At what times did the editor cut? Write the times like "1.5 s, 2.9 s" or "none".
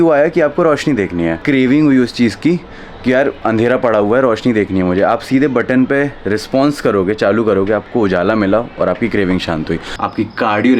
1.4 s, 9.9 s